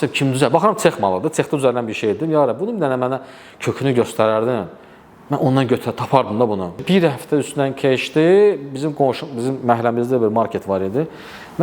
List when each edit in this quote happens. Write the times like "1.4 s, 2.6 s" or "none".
6.8 s